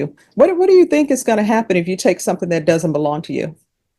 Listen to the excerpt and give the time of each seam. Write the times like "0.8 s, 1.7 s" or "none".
none